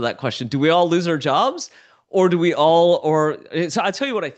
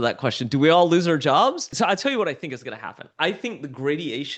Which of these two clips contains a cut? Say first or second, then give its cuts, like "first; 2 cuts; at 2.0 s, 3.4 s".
second; 1 cut; at 1.8 s